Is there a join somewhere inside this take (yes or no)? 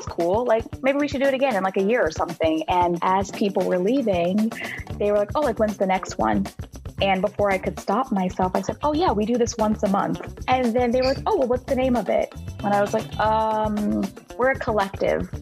no